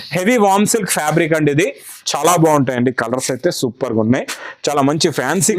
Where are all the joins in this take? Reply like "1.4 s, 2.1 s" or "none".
2.4 s

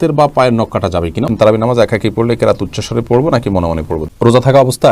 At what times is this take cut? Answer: 1.3 s, 4.0 s

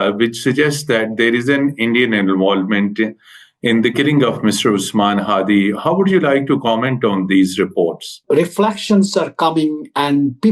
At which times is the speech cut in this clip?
8.2 s

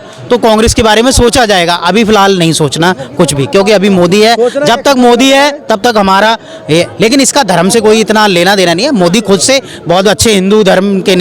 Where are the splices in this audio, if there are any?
none

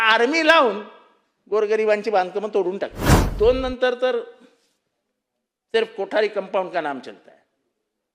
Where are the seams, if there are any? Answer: 3.2 s

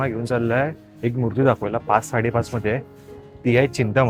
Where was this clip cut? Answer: none

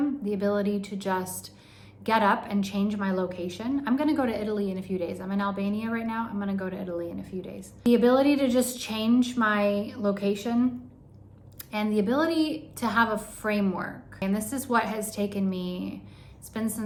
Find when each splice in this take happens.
none

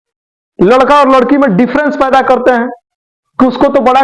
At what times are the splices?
none

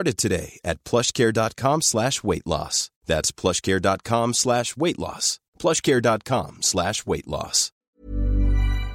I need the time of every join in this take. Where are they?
7.9 s

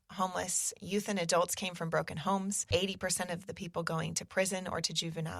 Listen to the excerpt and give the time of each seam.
2.6 s

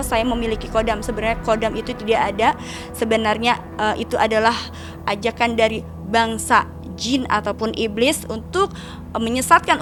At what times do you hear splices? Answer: none

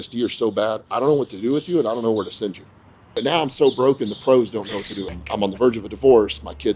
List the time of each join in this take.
3.2 s, 5.2 s

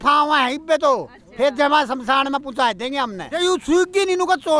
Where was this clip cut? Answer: 3.2 s

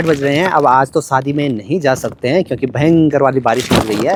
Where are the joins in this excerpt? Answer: none

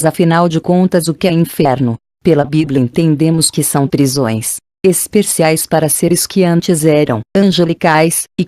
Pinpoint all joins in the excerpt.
3.9 s

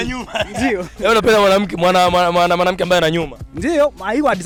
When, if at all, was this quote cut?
none

